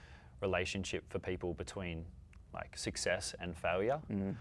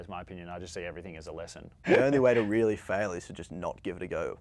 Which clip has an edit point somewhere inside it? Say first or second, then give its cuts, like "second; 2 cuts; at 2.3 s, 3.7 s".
second; 1 cut; at 1.9 s